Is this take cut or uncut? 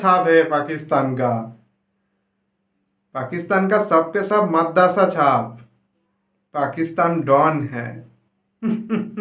uncut